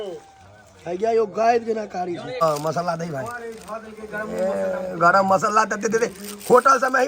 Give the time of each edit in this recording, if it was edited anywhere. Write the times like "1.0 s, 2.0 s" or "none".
2.3 s